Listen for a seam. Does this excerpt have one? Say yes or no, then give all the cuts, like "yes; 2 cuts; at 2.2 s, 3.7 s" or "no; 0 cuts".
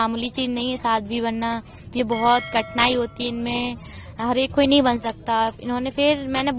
no; 0 cuts